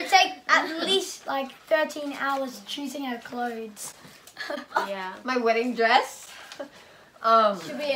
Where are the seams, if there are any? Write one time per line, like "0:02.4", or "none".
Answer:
none